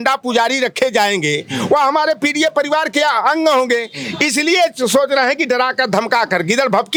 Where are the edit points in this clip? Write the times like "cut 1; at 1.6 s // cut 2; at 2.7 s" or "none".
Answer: none